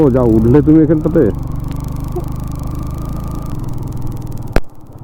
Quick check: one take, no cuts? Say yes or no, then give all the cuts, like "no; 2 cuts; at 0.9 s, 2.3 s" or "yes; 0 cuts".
yes; 0 cuts